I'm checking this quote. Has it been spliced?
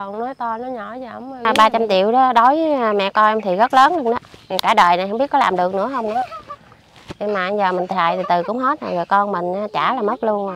yes; 1 cut; at 1.4 s

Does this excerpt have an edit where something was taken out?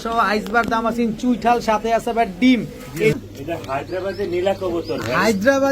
yes; 1 cut; at 3.2 s

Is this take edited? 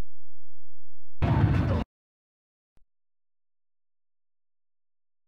no; 0 cuts

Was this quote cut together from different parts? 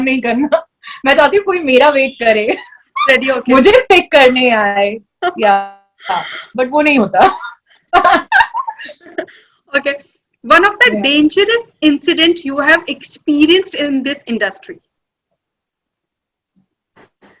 no; 0 cuts

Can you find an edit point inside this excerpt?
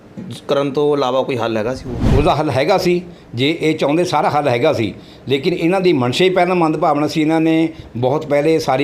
yes; 1 cut; at 1.9 s

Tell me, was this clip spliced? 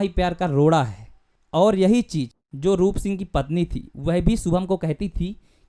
yes; 1 cut; at 2.4 s

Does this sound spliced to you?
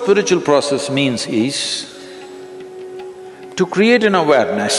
no; 0 cuts

